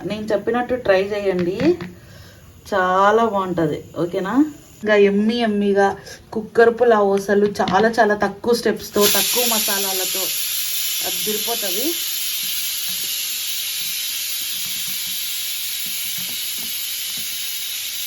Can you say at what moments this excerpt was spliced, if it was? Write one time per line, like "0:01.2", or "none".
0:04.8